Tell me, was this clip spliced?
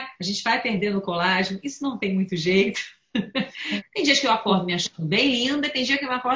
yes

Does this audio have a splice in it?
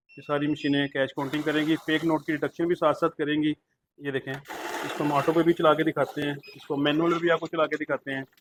no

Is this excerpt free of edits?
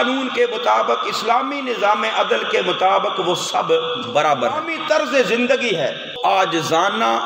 no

